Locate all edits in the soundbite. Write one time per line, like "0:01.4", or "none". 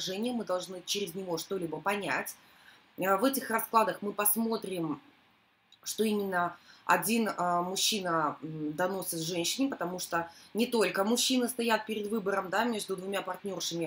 0:11.5